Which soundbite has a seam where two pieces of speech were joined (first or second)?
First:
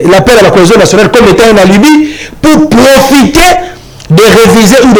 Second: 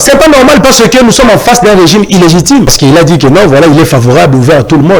second